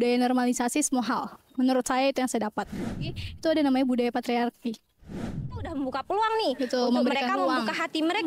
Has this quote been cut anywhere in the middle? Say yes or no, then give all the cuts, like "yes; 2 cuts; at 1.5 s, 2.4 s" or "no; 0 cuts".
yes; 2 cuts; at 3.1 s, 5.3 s